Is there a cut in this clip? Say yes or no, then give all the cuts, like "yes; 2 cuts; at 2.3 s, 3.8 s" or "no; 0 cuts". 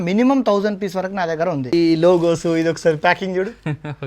yes; 1 cut; at 1.7 s